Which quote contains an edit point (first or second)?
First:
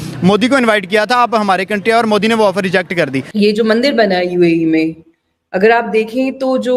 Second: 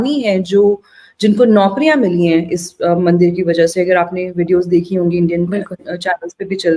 first